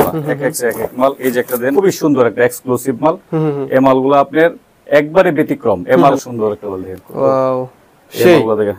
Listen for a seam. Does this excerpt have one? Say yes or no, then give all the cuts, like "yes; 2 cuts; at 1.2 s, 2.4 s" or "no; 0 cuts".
yes; 2 cuts; at 1.7 s, 6.2 s